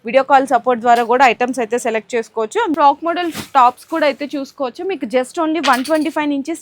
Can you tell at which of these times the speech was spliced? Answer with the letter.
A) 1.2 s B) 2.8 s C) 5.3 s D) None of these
B